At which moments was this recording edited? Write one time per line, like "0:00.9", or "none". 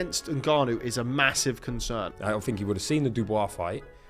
0:02.1